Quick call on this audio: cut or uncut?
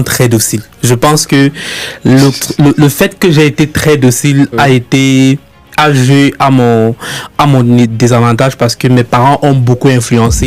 uncut